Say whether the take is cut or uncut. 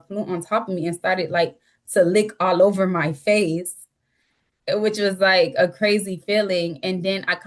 uncut